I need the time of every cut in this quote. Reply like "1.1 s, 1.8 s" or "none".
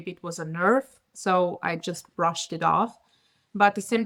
none